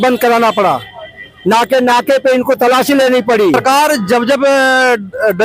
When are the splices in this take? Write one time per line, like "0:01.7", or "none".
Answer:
0:03.6

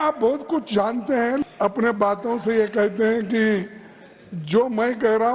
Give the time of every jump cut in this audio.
0:01.4

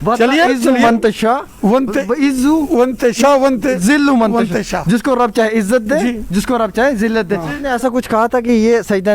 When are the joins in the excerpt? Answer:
0:07.6

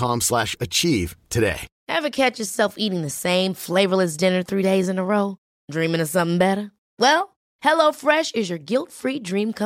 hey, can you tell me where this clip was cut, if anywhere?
0:01.7

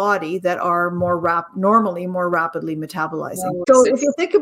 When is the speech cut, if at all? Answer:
none

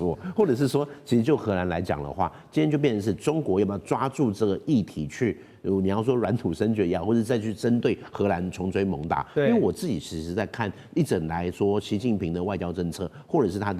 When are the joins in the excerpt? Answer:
none

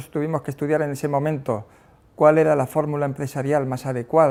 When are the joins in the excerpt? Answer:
none

